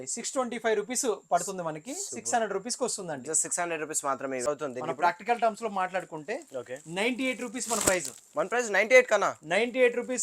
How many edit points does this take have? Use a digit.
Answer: 1